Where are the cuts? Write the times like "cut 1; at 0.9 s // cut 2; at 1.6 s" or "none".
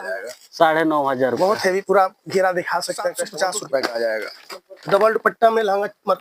cut 1; at 3.2 s // cut 2; at 4.3 s

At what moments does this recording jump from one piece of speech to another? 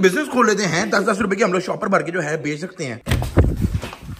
cut 1; at 3.0 s

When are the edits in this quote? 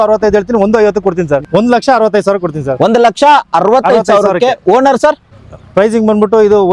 cut 1; at 1.4 s // cut 2; at 5.4 s

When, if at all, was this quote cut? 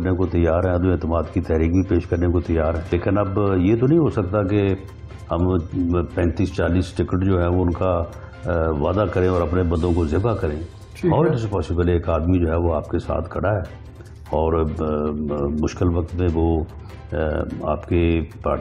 cut 1; at 2.9 s

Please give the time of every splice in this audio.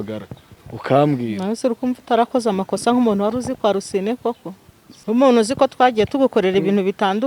cut 1; at 4.9 s

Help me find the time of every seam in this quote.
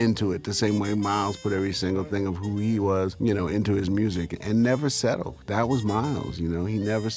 cut 1; at 3.1 s // cut 2; at 4.3 s // cut 3; at 5.3 s

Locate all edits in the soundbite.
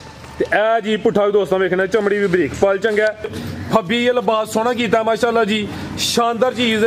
cut 1; at 3.4 s

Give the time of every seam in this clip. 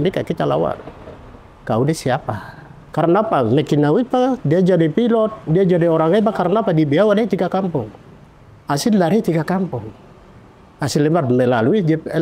cut 1; at 2.8 s

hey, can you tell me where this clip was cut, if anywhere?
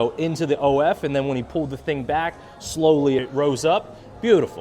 cut 1; at 3.2 s

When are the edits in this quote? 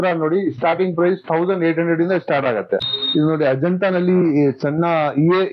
cut 1; at 2.9 s

